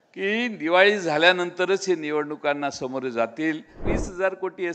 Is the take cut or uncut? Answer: cut